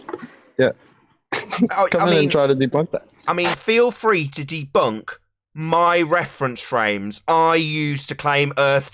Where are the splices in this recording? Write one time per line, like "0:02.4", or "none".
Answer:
none